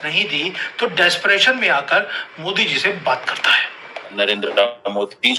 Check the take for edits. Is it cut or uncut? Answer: cut